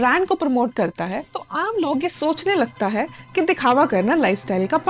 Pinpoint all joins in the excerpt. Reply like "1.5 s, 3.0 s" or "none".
1.3 s